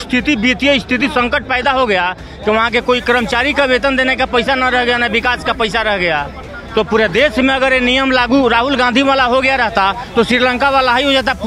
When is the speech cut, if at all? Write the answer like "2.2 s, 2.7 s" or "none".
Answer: none